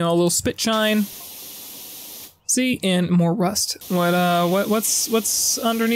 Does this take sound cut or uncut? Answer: cut